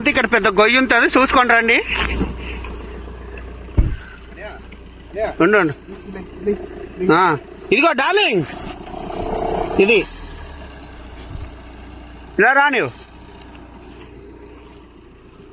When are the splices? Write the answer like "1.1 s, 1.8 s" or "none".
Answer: none